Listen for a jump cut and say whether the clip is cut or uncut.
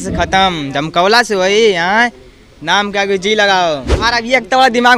cut